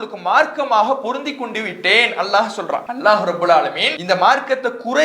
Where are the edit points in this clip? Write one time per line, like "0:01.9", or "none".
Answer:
0:02.9
0:03.9